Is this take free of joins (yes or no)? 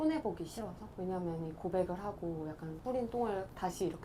no